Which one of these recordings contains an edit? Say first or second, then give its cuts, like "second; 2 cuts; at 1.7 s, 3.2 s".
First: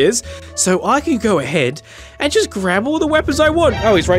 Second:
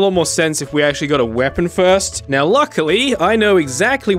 second; 1 cut; at 2.2 s